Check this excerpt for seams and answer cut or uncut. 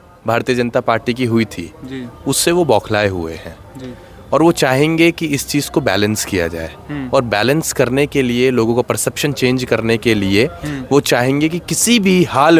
uncut